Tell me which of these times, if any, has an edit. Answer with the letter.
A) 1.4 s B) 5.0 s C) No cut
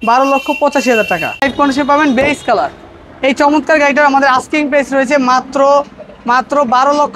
A